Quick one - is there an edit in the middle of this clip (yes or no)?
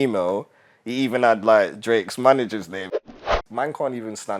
yes